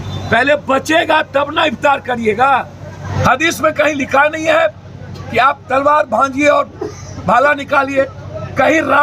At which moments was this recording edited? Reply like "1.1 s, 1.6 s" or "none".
3.0 s